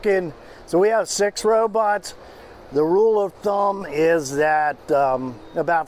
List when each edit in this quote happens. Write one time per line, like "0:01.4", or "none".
none